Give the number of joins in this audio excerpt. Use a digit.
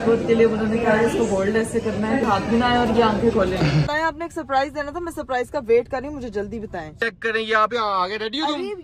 3